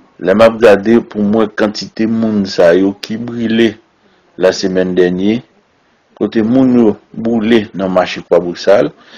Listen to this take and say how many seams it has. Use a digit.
1